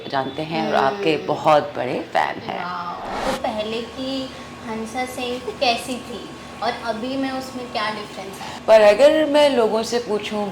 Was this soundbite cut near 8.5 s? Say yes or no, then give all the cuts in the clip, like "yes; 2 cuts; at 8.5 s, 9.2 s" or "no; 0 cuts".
yes; 2 cuts; at 3.2 s, 8.5 s